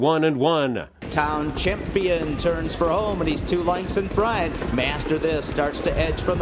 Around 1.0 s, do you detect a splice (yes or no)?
yes